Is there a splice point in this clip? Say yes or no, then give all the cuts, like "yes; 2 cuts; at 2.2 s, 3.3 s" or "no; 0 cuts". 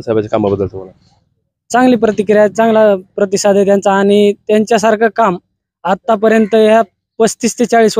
no; 0 cuts